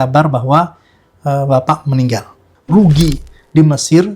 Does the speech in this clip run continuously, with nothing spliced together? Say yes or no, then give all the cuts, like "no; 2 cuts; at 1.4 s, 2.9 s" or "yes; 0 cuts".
no; 1 cut; at 2.5 s